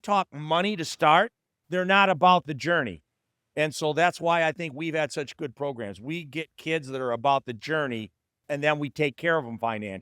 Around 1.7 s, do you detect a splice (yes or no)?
yes